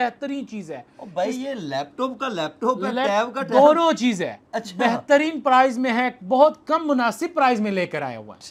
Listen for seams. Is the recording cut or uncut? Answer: uncut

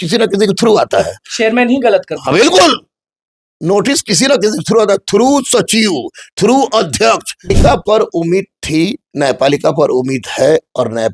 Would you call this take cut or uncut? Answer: cut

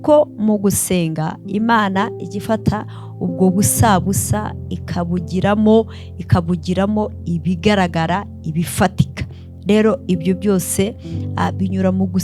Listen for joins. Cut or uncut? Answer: uncut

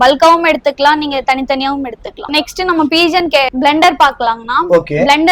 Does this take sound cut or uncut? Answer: uncut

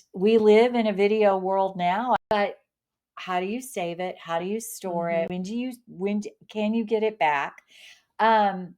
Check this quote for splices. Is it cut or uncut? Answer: cut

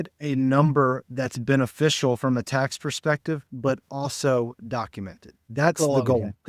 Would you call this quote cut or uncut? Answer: uncut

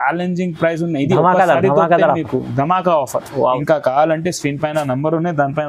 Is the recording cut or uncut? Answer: cut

